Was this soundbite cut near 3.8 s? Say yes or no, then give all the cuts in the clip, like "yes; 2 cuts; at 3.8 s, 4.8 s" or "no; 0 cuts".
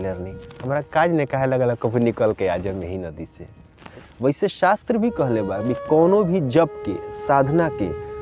yes; 1 cut; at 3.8 s